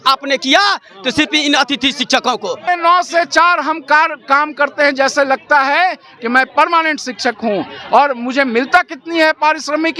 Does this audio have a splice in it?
yes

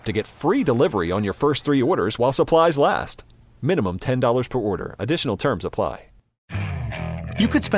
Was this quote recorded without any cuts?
no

